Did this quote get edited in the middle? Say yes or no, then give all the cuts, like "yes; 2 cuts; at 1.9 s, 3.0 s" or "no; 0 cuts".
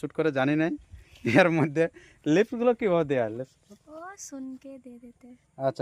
no; 0 cuts